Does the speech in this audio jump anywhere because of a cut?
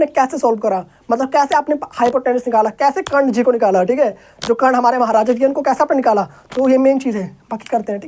no; 0 cuts

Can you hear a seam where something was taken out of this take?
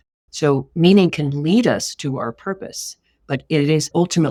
no; 0 cuts

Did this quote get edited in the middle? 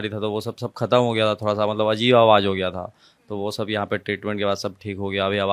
no; 0 cuts

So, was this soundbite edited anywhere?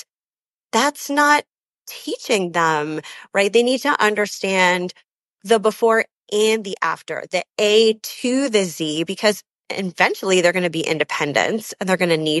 no; 0 cuts

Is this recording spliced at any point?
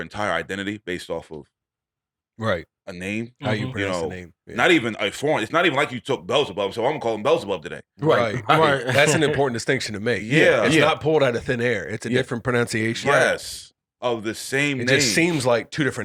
no; 0 cuts

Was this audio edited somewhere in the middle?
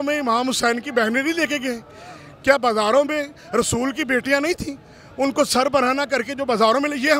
no; 0 cuts

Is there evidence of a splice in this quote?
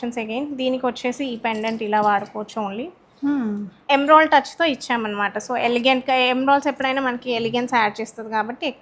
yes; 1 cut; at 3.8 s

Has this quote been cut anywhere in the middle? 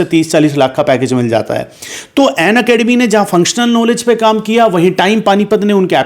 no; 0 cuts

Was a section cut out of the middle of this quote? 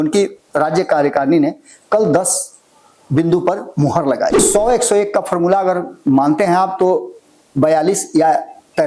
yes; 1 cut; at 4.4 s

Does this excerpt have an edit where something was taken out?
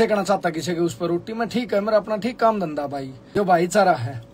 yes; 1 cut; at 3.4 s

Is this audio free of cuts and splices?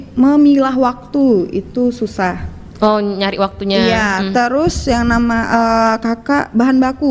yes; 0 cuts

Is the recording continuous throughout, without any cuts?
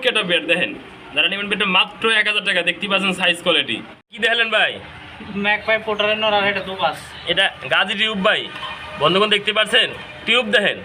yes; 0 cuts

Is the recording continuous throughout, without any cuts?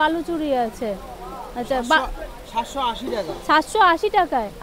yes; 0 cuts

